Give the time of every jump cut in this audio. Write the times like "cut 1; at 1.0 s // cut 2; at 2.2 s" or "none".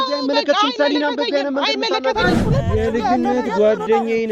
cut 1; at 2.4 s